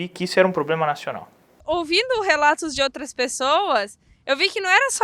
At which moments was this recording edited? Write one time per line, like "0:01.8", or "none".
0:01.5